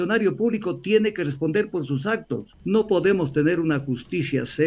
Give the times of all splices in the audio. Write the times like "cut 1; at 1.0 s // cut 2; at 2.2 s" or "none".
cut 1; at 2.5 s